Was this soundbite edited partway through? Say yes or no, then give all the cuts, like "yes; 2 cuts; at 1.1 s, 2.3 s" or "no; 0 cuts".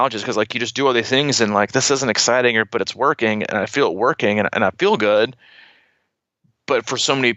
no; 0 cuts